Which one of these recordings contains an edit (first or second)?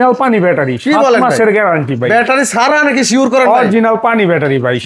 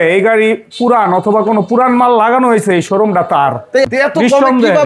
second